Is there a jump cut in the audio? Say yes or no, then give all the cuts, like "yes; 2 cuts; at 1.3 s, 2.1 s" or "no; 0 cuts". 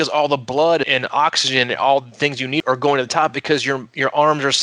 yes; 2 cuts; at 0.9 s, 2.6 s